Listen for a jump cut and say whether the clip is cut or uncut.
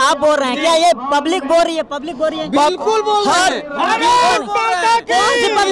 uncut